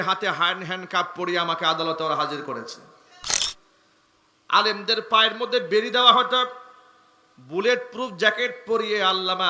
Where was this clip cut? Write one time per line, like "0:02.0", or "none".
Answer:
0:03.4